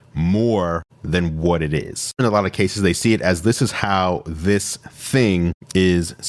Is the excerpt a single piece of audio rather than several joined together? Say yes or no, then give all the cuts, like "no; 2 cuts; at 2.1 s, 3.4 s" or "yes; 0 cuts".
no; 1 cut; at 2.2 s